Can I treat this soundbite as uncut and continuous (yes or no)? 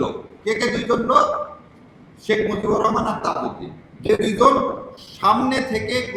yes